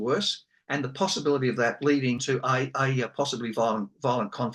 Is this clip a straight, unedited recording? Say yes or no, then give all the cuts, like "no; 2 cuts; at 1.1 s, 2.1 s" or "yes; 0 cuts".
no; 1 cut; at 2.2 s